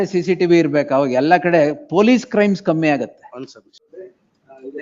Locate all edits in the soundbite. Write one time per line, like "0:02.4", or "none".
0:03.9